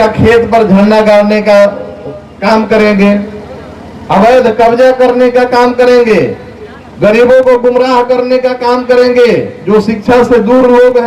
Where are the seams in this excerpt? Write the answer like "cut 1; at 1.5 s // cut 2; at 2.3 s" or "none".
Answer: none